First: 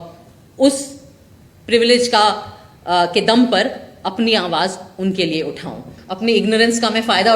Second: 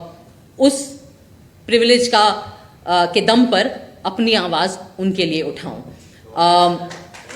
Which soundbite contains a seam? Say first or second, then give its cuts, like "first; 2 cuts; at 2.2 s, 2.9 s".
first; 1 cut; at 6.0 s